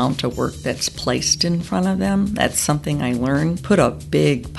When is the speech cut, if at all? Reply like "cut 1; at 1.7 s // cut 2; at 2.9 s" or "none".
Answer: cut 1; at 3.6 s